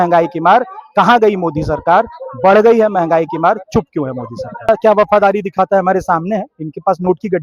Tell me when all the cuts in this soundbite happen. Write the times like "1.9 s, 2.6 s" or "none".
4.7 s